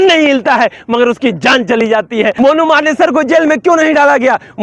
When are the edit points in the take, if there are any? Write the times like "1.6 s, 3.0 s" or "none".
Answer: 2.3 s